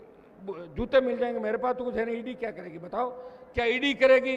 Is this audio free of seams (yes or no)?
yes